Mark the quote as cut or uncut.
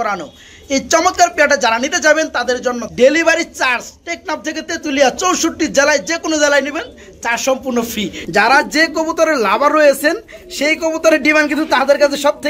cut